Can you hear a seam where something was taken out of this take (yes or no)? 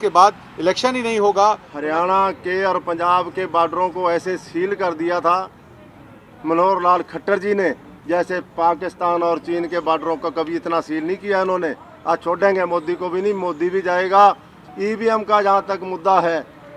yes